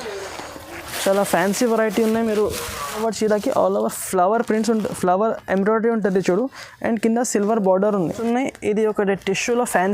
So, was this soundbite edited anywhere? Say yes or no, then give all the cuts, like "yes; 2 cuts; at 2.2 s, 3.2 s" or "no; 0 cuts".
yes; 2 cuts; at 3.0 s, 8.1 s